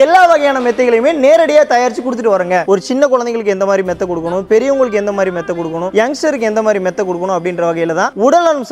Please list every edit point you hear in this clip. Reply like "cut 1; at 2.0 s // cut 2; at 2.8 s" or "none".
cut 1; at 2.6 s